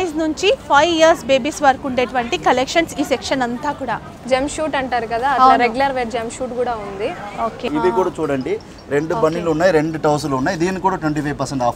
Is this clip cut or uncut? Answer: cut